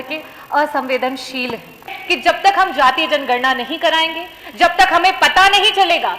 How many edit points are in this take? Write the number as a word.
one